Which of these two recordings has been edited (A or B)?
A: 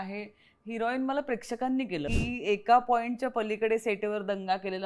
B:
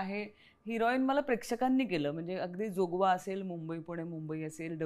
A